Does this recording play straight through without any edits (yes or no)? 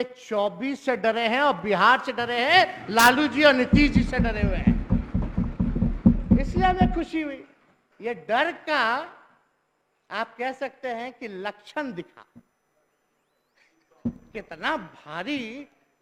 yes